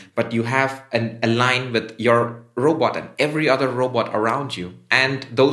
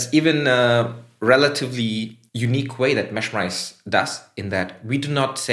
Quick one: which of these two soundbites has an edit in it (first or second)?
second